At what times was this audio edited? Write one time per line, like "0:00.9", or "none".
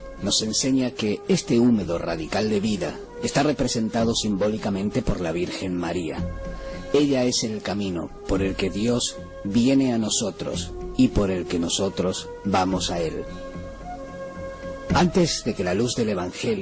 0:12.9